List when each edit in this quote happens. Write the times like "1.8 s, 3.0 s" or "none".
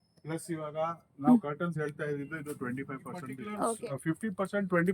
3.8 s